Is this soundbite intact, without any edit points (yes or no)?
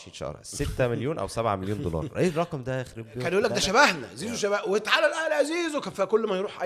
no